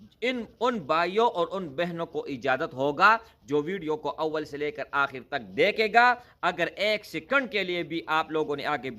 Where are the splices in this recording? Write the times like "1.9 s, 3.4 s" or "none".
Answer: none